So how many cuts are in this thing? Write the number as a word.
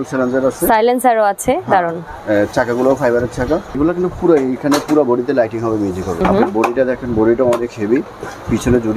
two